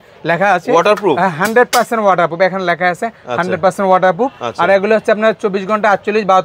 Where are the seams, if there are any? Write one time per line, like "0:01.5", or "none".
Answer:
none